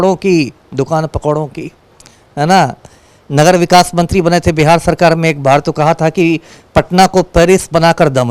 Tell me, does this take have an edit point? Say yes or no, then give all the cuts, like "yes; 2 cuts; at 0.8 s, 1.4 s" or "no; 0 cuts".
no; 0 cuts